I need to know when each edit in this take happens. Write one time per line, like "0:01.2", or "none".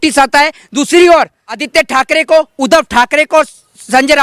0:01.6